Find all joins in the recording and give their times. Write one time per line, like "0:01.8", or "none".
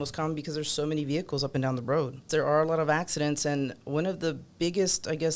0:02.2